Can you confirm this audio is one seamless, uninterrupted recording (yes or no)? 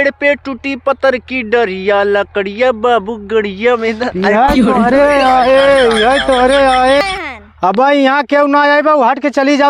no